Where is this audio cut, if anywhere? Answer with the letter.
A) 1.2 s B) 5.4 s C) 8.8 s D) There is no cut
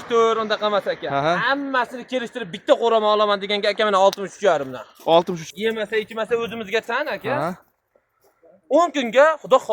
B